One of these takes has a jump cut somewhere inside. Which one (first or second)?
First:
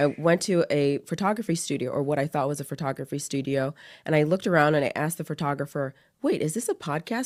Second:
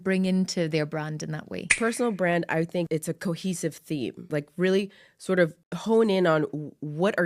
second